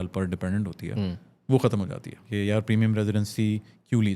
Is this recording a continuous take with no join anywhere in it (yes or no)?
no